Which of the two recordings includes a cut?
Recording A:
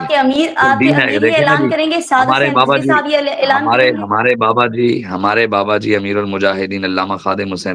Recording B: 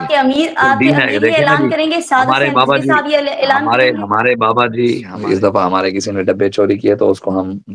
B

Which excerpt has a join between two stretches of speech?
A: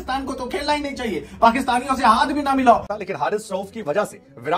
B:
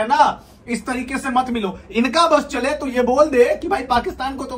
A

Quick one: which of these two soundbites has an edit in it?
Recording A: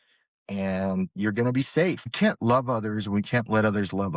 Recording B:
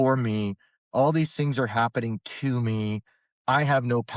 A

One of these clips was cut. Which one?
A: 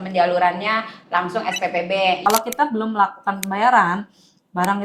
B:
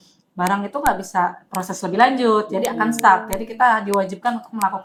A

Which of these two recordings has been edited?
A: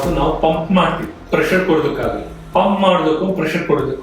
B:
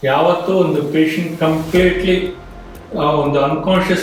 A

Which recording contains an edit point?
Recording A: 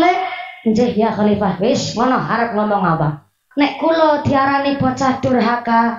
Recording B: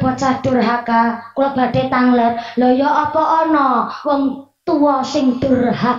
A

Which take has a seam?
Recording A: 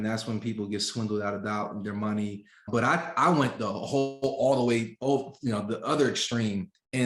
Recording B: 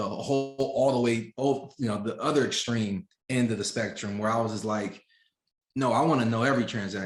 A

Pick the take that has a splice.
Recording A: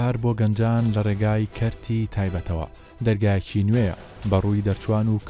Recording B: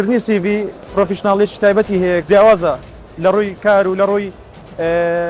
B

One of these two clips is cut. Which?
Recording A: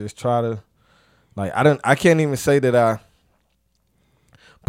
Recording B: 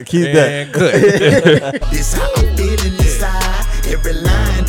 B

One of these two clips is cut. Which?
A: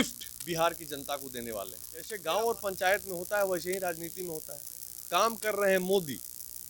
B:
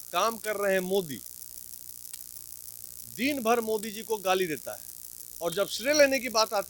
A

